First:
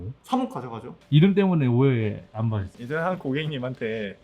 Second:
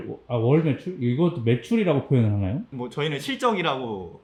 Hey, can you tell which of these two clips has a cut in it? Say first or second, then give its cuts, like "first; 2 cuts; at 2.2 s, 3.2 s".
first; 1 cut; at 0.9 s